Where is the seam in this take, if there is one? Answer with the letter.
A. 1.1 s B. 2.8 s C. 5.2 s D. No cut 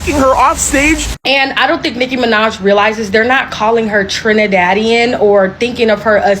A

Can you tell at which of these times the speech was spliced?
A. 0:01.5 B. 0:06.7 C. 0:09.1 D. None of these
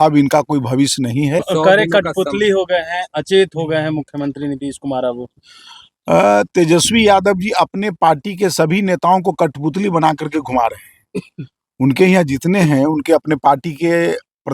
A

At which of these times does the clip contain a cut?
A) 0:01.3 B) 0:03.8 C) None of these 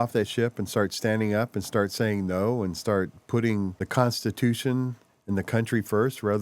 B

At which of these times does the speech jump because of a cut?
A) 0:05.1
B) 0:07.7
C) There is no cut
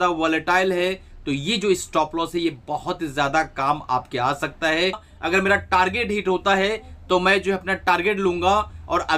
A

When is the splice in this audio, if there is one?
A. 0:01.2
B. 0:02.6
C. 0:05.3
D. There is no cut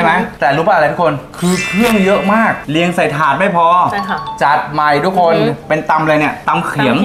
B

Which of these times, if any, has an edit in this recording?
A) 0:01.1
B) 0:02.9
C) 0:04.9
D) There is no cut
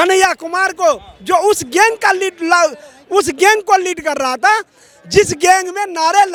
D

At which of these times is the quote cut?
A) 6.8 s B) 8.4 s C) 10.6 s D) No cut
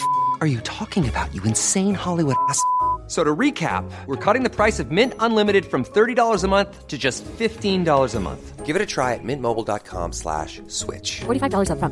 D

